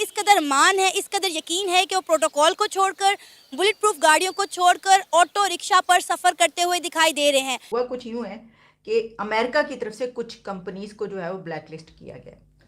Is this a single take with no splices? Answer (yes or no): no